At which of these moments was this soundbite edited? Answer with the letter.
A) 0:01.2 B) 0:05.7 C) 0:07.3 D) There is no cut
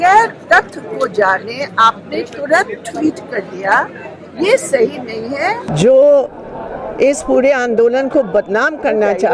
B